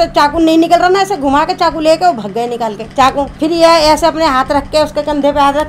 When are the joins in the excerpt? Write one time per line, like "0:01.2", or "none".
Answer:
none